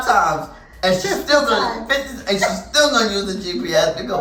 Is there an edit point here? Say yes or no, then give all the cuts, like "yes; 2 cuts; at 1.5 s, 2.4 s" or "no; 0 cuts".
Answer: no; 0 cuts